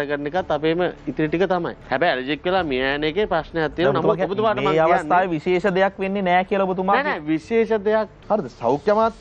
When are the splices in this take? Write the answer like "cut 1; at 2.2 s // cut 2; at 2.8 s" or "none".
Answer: cut 1; at 1.8 s // cut 2; at 8.1 s